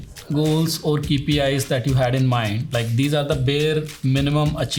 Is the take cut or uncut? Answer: uncut